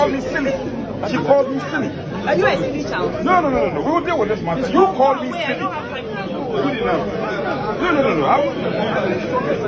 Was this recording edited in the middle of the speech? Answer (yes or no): no